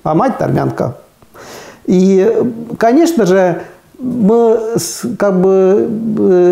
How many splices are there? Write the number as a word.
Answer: zero